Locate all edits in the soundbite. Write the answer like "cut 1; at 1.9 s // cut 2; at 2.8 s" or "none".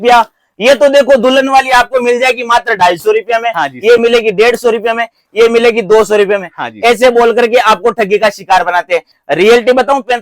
cut 1; at 9.2 s